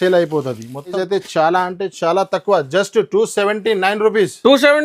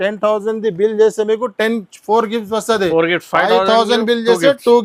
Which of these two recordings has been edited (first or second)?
first